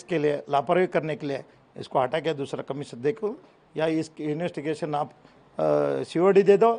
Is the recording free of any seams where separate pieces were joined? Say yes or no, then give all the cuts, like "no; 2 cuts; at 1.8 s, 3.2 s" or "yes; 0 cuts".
yes; 0 cuts